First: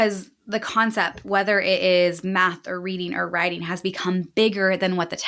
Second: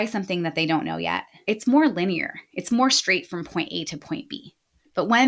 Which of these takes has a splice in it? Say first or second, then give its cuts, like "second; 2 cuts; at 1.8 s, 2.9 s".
second; 1 cut; at 1.3 s